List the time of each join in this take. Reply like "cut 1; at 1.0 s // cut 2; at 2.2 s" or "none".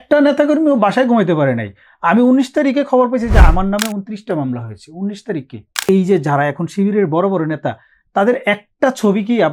cut 1; at 5.8 s